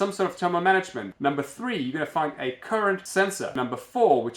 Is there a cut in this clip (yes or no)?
yes